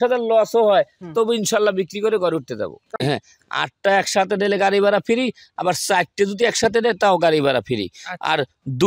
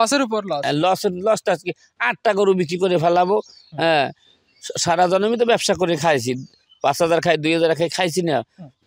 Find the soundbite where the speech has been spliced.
first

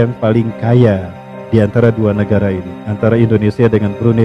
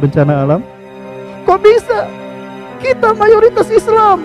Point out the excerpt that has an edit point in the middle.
second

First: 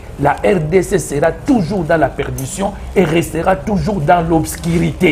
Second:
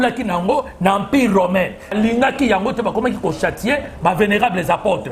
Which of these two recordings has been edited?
second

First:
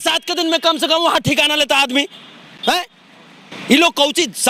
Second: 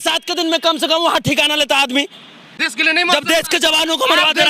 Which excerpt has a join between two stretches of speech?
second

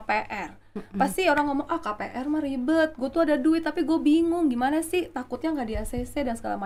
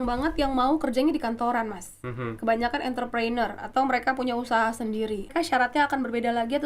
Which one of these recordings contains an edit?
second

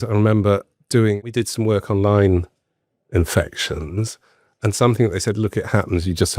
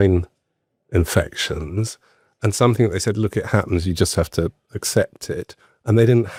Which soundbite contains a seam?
first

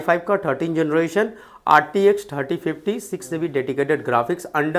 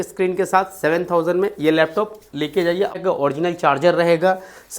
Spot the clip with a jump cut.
second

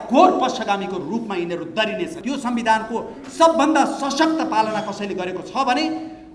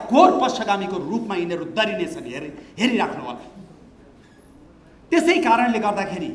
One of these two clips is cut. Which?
first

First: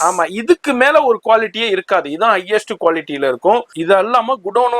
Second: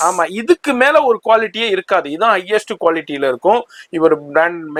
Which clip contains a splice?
first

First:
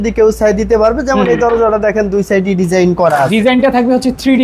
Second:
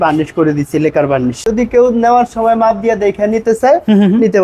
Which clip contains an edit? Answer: second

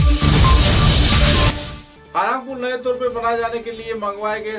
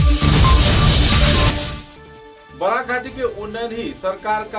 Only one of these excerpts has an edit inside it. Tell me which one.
second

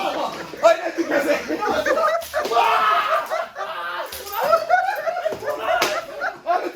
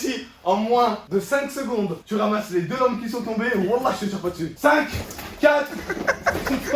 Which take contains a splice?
second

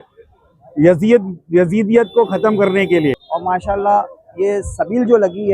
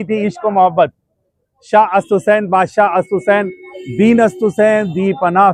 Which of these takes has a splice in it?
first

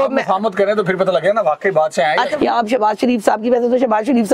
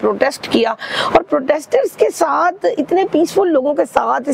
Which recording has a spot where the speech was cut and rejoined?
first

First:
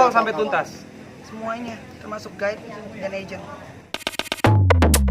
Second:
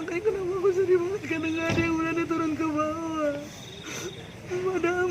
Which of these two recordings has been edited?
first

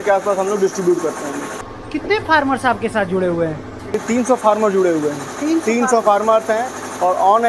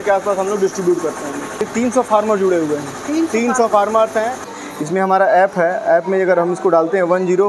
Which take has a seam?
second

